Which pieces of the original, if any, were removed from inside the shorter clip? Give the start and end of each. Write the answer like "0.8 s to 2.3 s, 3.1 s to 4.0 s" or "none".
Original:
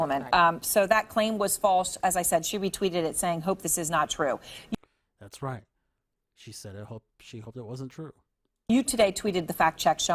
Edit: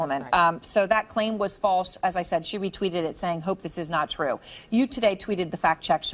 4.5 s to 8.5 s